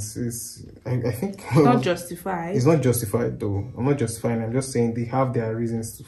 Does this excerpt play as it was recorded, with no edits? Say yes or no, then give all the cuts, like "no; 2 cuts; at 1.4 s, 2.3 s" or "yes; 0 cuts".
yes; 0 cuts